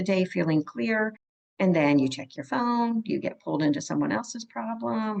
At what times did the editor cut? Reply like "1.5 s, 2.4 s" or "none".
none